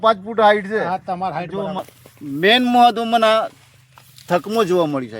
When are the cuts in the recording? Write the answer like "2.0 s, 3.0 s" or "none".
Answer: 1.8 s